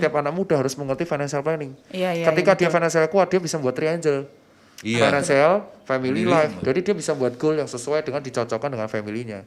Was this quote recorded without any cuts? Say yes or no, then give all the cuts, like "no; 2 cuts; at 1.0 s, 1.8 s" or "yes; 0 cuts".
yes; 0 cuts